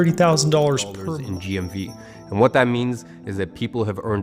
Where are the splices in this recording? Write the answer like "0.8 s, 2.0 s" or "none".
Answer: 0.9 s